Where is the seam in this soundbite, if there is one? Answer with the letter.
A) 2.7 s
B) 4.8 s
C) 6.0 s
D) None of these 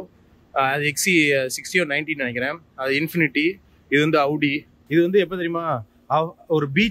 B